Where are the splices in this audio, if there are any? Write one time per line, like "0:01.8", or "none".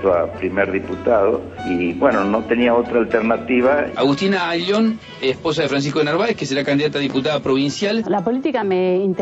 0:01.5
0:04.0
0:08.0